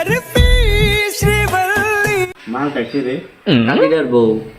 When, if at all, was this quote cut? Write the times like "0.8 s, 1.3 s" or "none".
2.3 s